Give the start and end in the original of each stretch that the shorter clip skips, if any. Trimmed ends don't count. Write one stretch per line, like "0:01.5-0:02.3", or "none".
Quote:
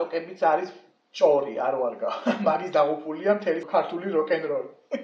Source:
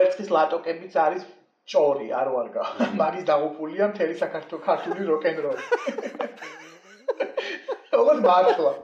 0:04.1-0:04.6